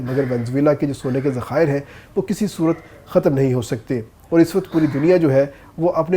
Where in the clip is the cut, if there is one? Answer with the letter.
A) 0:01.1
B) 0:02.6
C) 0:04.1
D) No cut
D